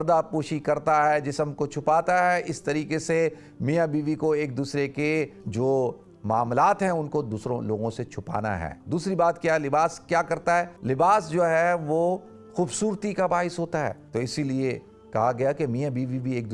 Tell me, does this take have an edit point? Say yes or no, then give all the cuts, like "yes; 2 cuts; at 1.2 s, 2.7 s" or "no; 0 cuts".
yes; 4 cuts; at 5.4 s, 8.8 s, 10.8 s, 14.0 s